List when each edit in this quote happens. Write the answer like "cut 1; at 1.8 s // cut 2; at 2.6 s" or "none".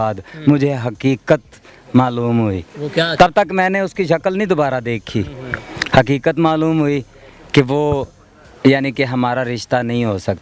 none